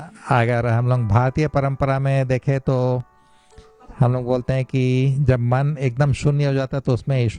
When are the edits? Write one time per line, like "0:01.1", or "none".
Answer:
none